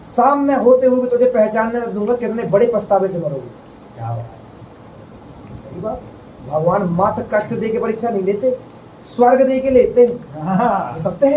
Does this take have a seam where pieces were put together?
no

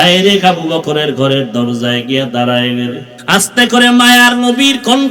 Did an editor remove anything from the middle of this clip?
yes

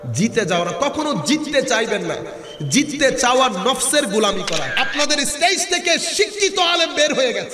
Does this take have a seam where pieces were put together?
yes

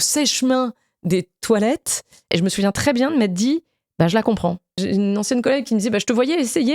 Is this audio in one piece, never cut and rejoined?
no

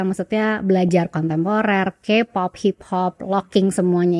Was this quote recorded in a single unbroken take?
yes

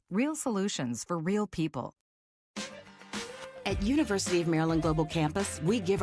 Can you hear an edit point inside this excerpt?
yes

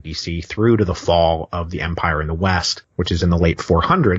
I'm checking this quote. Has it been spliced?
yes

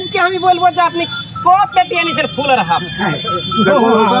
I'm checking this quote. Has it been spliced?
no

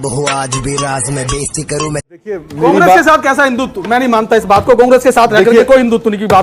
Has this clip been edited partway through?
yes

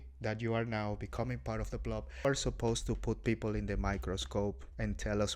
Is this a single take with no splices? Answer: no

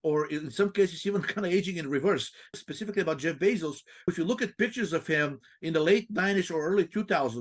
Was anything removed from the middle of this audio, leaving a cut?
yes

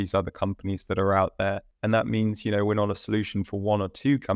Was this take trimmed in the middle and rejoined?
yes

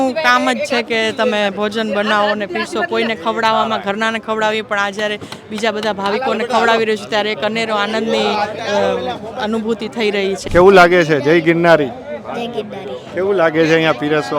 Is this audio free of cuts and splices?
no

